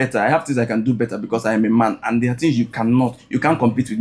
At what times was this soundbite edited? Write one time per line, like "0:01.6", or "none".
none